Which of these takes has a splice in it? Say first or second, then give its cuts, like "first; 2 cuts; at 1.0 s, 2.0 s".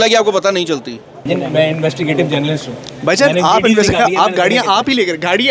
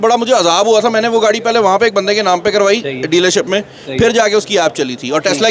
first; 1 cut; at 1.3 s